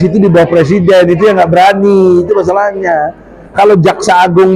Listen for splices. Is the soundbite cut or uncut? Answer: uncut